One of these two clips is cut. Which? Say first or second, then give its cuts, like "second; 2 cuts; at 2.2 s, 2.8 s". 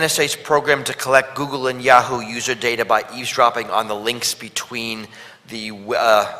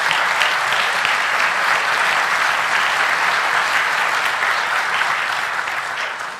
first; 1 cut; at 3.2 s